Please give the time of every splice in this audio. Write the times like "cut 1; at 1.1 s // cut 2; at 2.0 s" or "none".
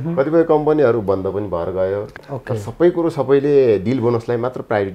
cut 1; at 2.2 s